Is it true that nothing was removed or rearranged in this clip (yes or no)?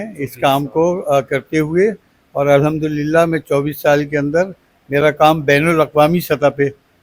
yes